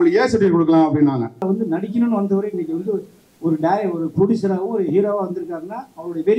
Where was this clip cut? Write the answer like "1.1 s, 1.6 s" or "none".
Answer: 1.4 s